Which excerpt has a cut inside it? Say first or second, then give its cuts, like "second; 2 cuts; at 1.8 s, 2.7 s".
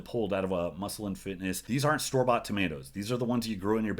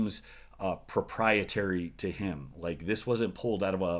first; 1 cut; at 1.6 s